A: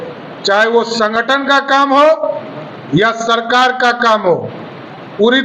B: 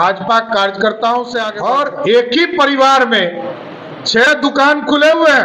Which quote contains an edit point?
B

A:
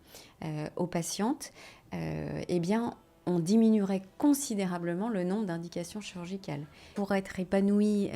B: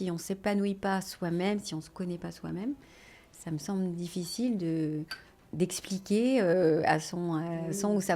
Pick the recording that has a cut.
A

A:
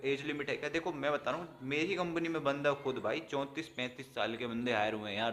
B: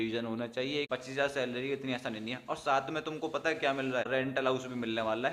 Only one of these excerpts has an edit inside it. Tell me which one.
B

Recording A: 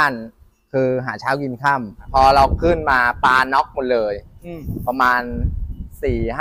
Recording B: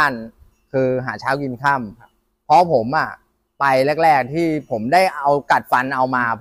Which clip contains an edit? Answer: A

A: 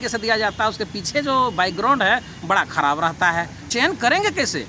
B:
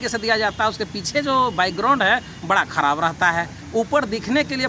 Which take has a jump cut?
A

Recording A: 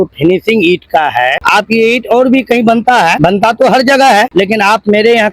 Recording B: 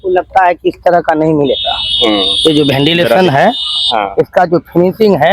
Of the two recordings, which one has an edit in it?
A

